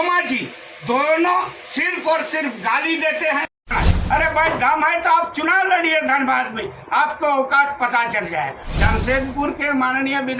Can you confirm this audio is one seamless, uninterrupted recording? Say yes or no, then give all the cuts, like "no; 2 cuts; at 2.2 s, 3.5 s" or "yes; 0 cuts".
no; 2 cuts; at 3.7 s, 8.7 s